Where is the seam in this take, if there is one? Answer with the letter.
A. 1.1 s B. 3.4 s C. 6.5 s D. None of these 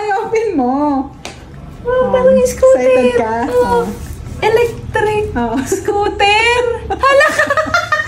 D